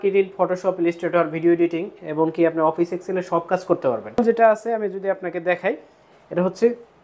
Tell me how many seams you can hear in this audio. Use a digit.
1